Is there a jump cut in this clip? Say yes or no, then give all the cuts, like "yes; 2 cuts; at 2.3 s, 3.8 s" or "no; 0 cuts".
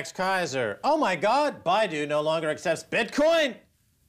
no; 0 cuts